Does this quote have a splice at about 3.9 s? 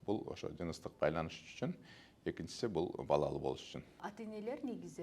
yes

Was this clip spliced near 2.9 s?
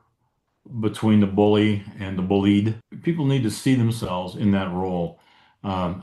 yes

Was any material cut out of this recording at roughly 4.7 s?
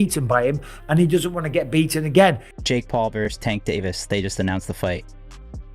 no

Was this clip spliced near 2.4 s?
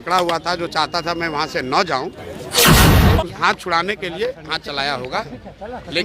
yes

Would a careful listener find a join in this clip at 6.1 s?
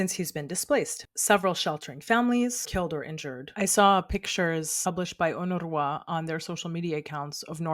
no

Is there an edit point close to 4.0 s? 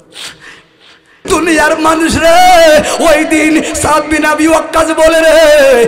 no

